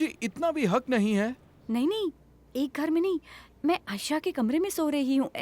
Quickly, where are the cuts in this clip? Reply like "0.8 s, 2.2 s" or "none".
1.5 s